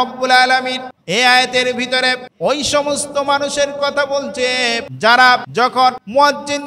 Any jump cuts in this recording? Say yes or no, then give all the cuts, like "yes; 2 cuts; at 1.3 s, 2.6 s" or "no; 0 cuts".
yes; 4 cuts; at 0.9 s, 2.3 s, 4.9 s, 5.7 s